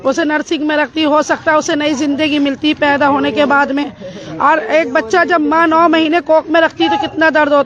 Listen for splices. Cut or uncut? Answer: uncut